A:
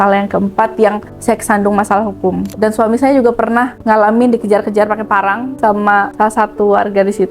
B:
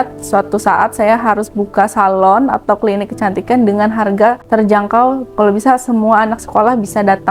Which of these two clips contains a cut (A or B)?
A